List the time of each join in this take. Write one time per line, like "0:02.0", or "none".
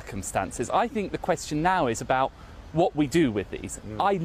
none